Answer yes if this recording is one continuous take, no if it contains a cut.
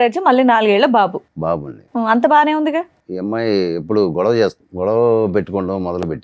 no